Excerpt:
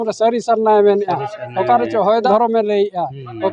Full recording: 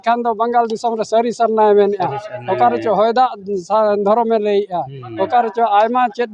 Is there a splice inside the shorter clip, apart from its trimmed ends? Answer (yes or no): yes